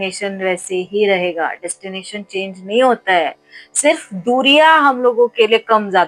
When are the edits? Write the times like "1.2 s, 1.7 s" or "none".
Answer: none